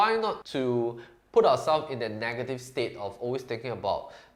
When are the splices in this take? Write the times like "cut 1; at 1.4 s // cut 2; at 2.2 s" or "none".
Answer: none